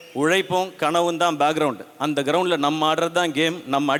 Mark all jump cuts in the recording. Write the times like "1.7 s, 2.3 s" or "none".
none